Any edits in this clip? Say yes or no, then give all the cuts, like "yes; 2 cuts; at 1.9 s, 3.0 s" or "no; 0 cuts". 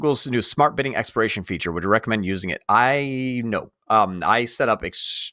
no; 0 cuts